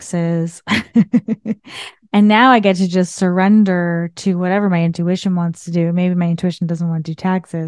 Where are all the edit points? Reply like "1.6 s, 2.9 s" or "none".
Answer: none